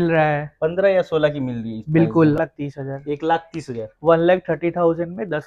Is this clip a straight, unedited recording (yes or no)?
no